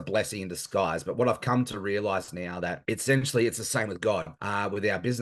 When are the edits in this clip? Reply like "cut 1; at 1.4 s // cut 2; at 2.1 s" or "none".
cut 1; at 2.8 s // cut 2; at 4.4 s